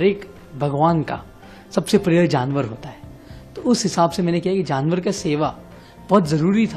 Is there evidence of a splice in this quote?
no; 0 cuts

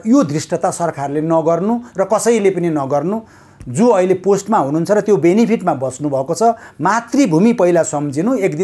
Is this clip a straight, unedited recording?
yes; 0 cuts

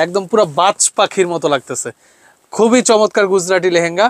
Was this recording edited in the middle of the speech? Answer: no; 0 cuts

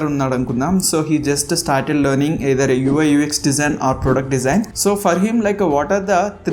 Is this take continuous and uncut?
no; 1 cut; at 4.7 s

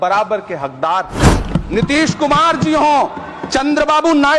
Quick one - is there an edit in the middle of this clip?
yes; 1 cut; at 1.4 s

